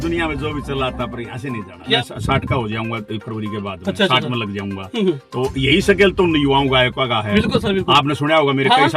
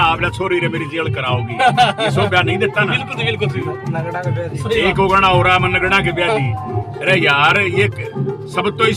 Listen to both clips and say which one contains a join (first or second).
first